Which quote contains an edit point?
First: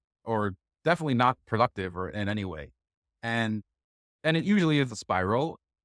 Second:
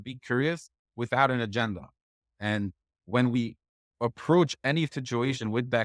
first; 1 cut; at 1.4 s

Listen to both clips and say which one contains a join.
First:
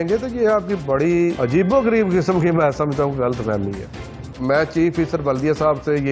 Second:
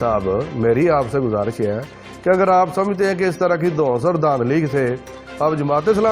first; 2 cuts; at 1.4 s, 4.3 s

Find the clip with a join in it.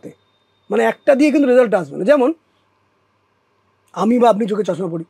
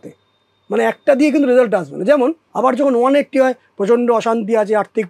second; 1 cut; at 2.5 s

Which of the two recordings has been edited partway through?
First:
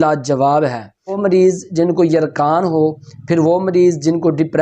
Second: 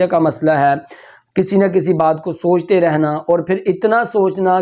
first; 1 cut; at 1.2 s

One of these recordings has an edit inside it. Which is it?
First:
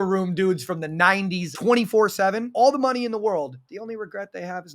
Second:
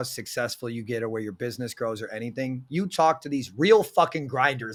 first; 3 cuts; at 1.5 s, 2.4 s, 3.8 s

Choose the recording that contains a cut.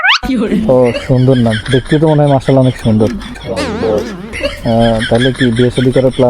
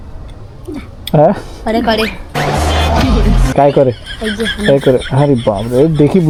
first; 1 cut; at 4.3 s

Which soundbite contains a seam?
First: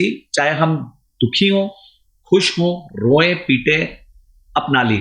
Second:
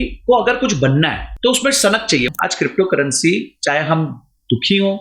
second; 2 cuts; at 1.2 s, 2.3 s

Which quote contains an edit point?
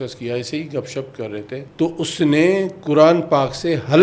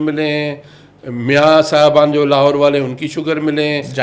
first; 1 cut; at 1.7 s

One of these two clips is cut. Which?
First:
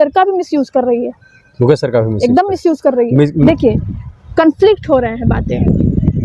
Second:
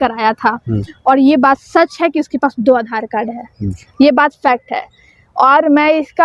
first; 1 cut; at 3.4 s

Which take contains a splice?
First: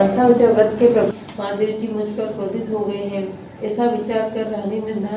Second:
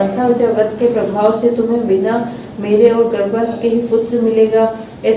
first; 1 cut; at 1.1 s

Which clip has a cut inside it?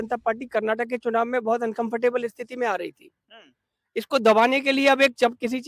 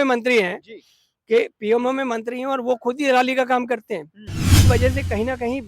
second; 1 cut; at 4.6 s

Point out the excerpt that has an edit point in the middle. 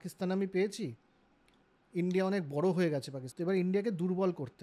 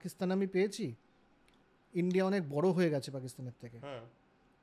first; 1 cut; at 3.2 s

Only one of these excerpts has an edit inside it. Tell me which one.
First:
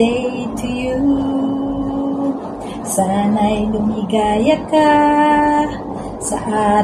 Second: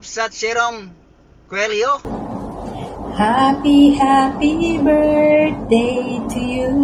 second; 1 cut; at 2.0 s

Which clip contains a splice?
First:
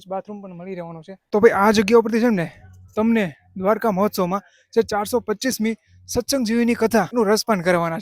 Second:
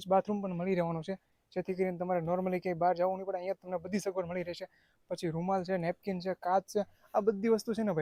first; 2 cuts; at 1.1 s, 7.1 s

